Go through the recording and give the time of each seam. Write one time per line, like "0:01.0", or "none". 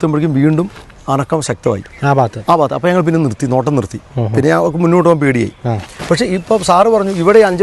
0:06.0